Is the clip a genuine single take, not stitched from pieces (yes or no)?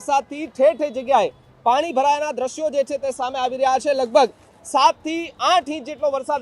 yes